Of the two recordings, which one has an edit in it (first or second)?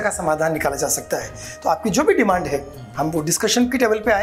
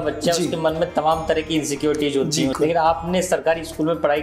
second